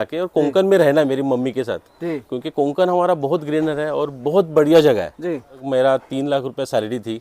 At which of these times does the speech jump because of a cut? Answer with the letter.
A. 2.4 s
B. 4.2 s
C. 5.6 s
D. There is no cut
C